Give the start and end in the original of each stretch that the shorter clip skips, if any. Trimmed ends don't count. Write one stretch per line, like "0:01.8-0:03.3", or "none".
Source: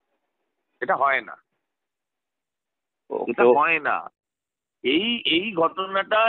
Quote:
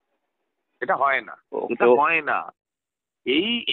0:01.4-0:02.9